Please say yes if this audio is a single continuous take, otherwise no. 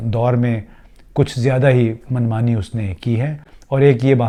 yes